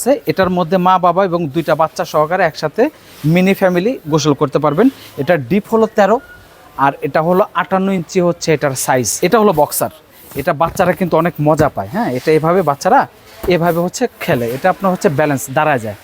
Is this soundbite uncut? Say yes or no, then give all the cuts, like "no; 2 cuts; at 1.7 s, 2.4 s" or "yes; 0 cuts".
no; 1 cut; at 9.1 s